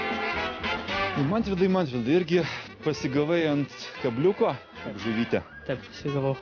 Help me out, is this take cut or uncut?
uncut